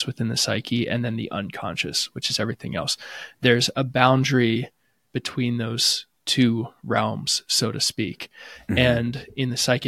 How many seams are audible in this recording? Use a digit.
0